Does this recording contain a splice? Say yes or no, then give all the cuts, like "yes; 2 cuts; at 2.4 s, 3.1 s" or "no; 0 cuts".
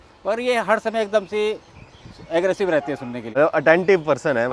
yes; 1 cut; at 3.3 s